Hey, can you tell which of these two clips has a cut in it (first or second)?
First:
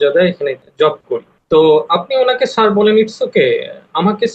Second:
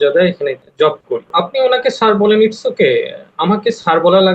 second